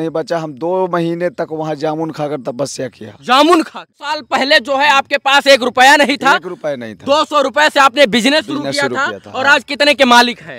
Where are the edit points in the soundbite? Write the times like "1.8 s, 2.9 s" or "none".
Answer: 3.9 s